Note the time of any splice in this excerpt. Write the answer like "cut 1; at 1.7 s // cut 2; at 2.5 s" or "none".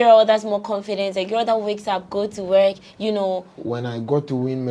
cut 1; at 3.6 s